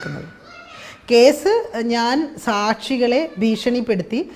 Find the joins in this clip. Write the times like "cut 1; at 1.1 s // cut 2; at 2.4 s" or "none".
none